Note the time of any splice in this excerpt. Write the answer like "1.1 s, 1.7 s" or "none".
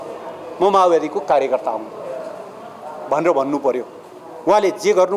none